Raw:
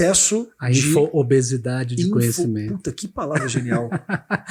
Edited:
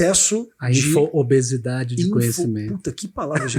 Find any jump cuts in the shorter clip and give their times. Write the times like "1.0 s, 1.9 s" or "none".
none

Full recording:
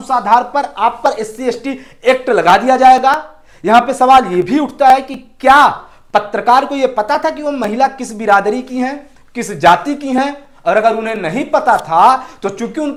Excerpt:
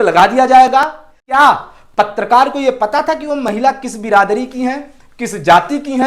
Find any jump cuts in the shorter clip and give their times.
1.4 s

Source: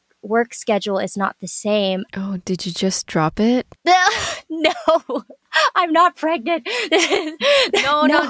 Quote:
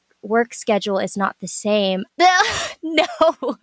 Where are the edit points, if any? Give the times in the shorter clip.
2.1 s

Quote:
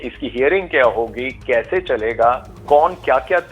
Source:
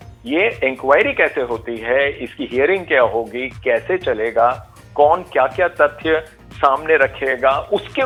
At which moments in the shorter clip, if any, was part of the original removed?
2.5 s

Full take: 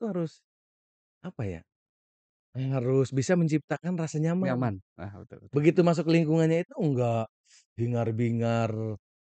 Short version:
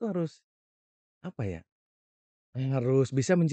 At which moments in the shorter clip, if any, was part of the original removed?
none

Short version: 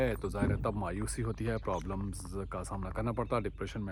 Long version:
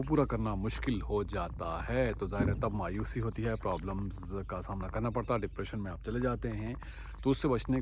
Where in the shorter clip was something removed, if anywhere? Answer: none

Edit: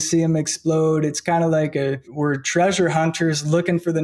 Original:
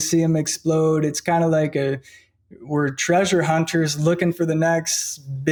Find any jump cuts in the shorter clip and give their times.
2.0 s

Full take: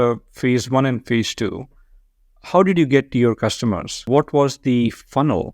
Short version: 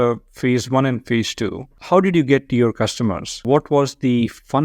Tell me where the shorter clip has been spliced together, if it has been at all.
1.7 s

